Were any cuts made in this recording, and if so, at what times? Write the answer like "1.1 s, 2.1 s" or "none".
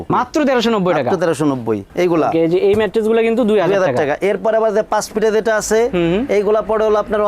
1.8 s